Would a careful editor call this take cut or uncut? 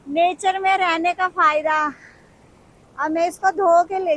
uncut